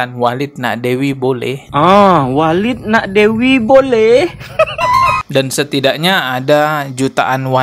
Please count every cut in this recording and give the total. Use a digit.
1